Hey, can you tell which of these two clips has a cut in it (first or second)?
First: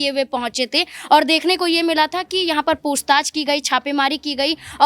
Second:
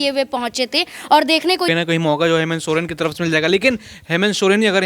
second